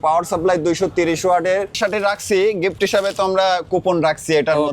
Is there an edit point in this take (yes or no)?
yes